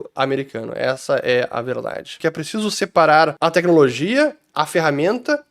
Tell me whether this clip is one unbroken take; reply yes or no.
no